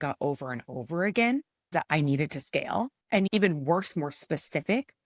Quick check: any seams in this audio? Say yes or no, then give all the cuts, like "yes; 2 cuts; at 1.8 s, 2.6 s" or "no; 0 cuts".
yes; 2 cuts; at 1.7 s, 3.3 s